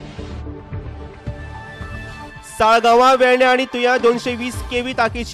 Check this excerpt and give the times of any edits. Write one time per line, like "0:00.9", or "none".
0:01.6

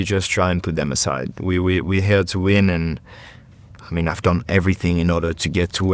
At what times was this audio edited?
none

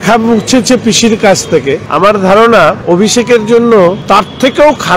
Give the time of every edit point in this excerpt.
0:01.9
0:02.8
0:04.0

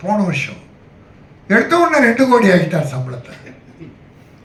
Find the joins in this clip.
none

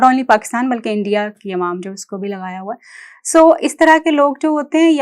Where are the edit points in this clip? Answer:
none

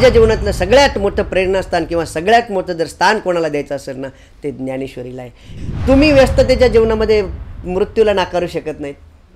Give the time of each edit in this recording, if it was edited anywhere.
0:05.5

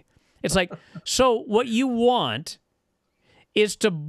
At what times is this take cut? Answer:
none

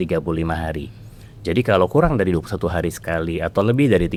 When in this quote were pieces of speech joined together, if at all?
none

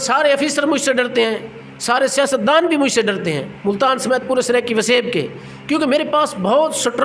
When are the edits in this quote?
0:03.5

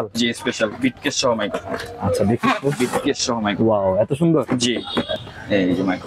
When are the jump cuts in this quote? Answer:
0:05.1

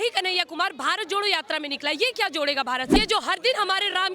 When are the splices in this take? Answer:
0:02.9

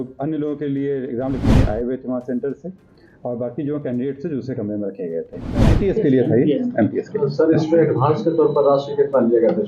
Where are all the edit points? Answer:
0:05.5

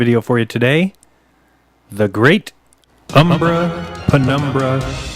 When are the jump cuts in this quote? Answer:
0:03.8

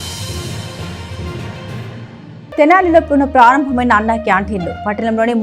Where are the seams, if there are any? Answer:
0:02.1

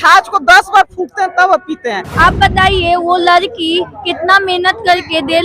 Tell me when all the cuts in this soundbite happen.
0:02.0

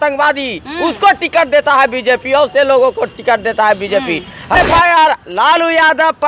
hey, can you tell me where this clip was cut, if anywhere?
0:04.6

